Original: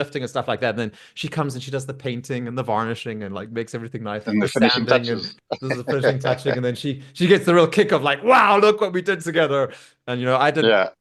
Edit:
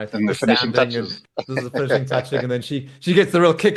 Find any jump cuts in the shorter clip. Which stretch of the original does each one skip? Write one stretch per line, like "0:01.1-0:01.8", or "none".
none